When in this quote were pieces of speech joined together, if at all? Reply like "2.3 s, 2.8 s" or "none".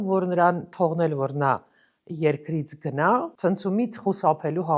3.3 s